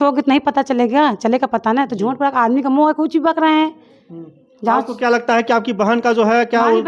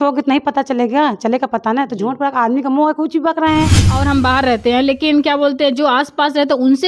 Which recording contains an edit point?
second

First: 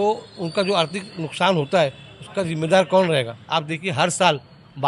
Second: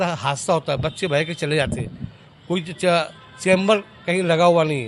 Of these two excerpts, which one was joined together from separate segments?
first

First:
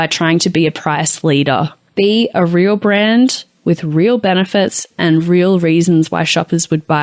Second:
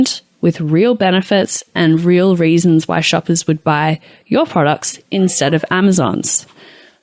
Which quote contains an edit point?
first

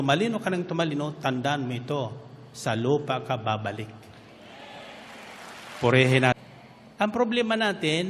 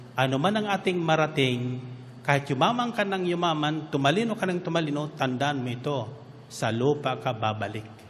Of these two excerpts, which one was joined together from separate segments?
first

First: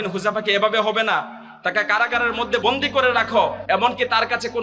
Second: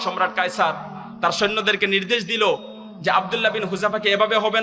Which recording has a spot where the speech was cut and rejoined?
first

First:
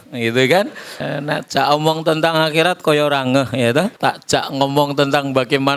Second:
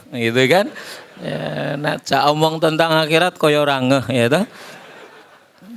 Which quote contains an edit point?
first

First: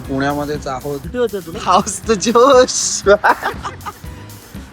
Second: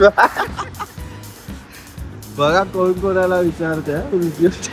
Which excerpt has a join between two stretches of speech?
first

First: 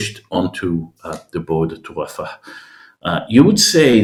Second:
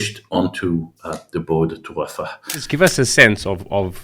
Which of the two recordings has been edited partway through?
second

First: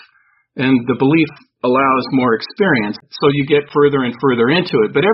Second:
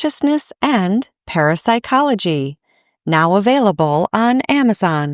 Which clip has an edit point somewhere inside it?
first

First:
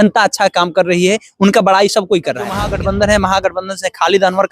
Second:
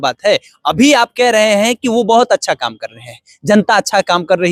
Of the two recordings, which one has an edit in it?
first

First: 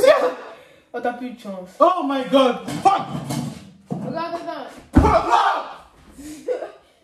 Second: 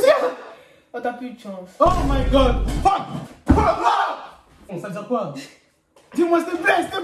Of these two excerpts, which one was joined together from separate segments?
second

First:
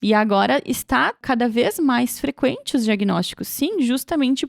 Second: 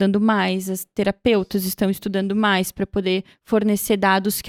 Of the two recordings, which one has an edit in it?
first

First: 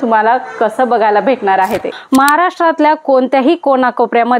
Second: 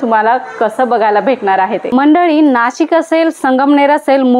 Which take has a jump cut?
first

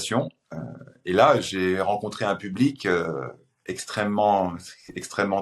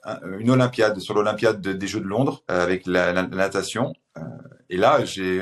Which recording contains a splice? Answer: second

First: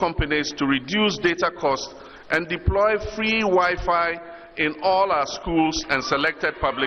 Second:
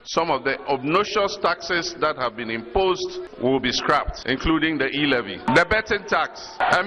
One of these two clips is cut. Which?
second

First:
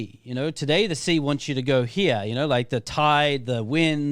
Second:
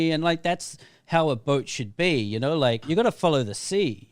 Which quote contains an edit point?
second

